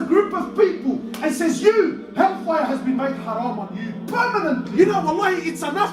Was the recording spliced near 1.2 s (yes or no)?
no